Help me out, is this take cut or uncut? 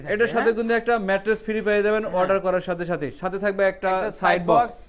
uncut